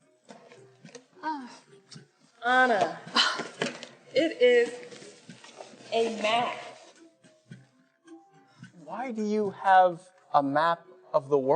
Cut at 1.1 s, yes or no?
no